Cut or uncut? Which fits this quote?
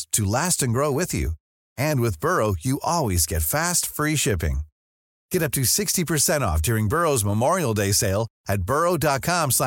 uncut